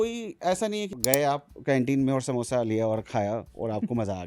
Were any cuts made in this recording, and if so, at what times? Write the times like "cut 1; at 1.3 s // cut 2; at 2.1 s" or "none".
cut 1; at 0.9 s